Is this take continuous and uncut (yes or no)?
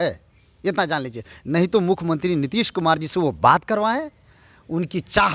yes